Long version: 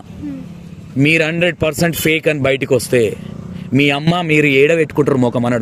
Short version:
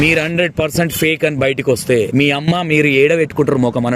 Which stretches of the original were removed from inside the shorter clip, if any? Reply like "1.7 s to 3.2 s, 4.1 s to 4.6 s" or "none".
3.1 s to 3.7 s

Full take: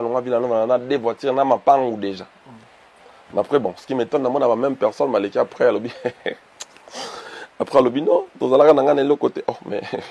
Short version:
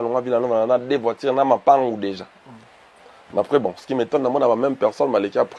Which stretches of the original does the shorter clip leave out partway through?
none

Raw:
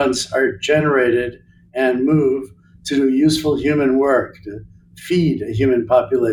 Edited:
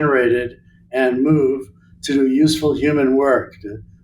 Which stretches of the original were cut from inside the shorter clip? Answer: none

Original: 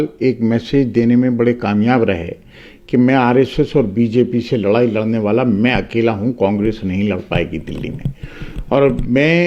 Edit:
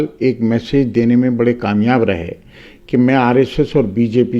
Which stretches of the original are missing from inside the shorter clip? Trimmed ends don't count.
none

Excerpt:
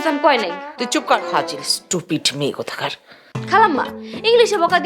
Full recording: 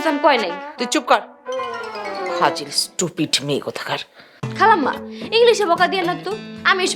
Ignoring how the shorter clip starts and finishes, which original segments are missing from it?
1.2 s to 2.3 s

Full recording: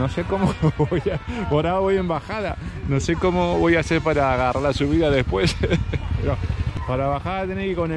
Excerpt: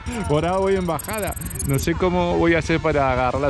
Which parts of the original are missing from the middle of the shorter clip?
none

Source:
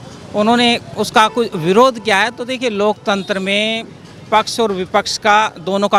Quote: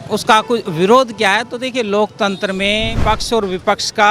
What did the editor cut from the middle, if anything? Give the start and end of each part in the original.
3.8 s to 4.2 s

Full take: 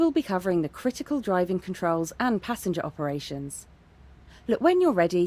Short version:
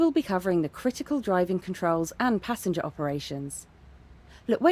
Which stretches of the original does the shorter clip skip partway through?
none

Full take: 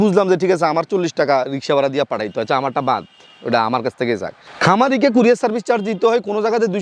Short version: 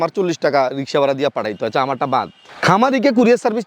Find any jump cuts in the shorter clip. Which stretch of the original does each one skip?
3.2 s to 4.4 s

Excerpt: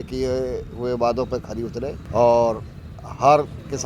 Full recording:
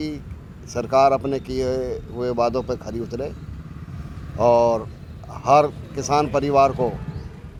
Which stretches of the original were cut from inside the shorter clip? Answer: 3.4 s to 4.2 s

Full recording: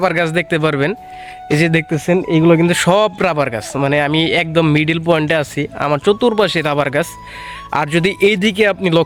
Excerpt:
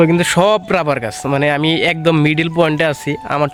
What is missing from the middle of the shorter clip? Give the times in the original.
none

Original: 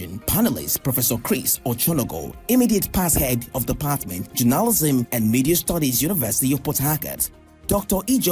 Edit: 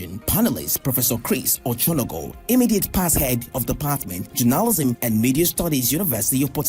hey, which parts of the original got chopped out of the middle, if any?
4.8 s to 4.9 s

